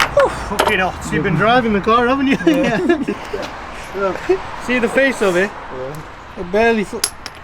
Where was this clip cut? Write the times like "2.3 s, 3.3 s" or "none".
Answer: 3.1 s